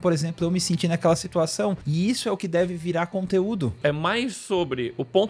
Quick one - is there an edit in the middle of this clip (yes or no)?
yes